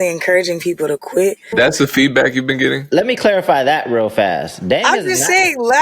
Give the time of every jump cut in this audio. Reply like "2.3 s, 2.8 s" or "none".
1.5 s, 2.9 s